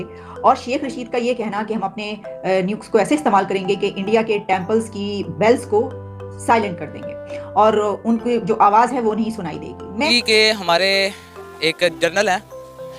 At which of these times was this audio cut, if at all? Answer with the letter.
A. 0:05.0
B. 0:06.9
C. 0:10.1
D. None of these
C